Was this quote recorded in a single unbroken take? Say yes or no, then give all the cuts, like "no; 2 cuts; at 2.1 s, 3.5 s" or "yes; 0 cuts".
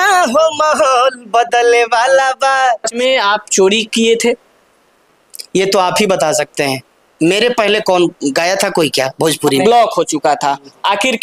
no; 2 cuts; at 3.0 s, 9.6 s